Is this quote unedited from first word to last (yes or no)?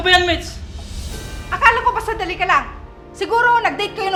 yes